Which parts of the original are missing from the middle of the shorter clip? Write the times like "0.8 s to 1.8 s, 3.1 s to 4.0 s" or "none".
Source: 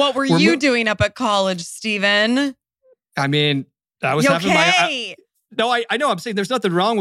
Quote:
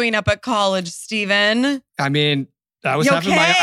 2.6 s to 3.1 s